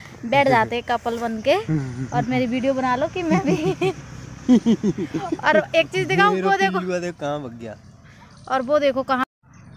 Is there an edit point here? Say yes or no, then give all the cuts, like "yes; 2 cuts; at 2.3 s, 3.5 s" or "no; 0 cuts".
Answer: no; 0 cuts